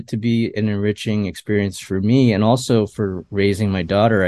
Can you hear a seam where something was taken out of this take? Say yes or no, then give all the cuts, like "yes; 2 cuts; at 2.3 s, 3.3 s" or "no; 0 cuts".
yes; 1 cut; at 3.2 s